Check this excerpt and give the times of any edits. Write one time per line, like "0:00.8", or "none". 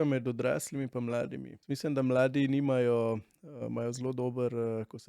0:01.5